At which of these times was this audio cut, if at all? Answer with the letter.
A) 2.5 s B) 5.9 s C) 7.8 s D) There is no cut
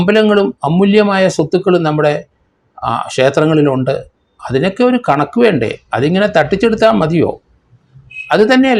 D